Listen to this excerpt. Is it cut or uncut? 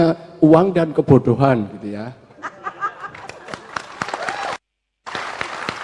uncut